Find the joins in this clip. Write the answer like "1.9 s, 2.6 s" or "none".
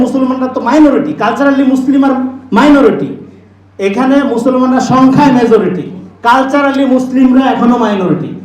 none

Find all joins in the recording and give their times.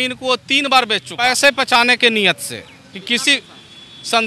1.2 s

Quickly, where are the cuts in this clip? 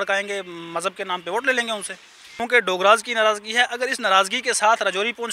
2.4 s

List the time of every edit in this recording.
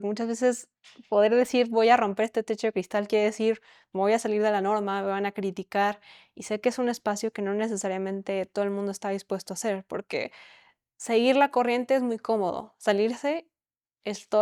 none

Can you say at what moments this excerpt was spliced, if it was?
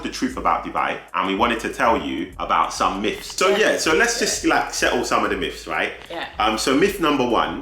1.0 s, 2.3 s, 3.4 s

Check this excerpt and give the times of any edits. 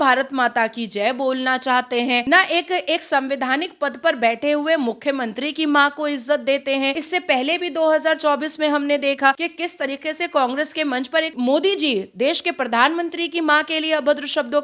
2.2 s, 7.0 s, 9.4 s, 11.3 s

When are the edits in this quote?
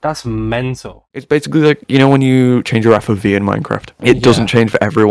1.2 s

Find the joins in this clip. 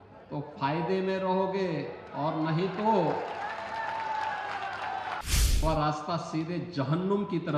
5.2 s

